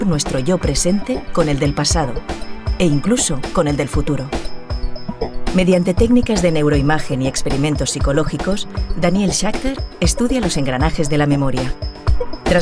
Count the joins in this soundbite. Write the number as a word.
one